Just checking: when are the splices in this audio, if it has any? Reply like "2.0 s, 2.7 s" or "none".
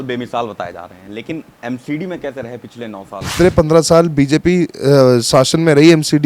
3.3 s